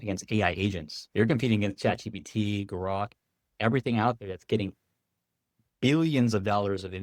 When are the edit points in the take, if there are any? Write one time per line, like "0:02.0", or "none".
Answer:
0:00.9